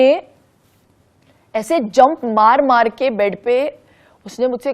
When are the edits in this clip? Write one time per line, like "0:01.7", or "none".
none